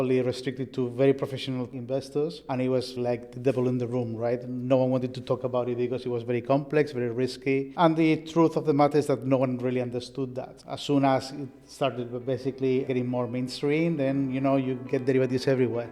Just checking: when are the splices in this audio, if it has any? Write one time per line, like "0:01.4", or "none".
0:01.7
0:03.0